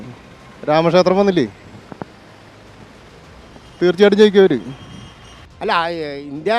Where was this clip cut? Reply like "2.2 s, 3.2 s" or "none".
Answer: none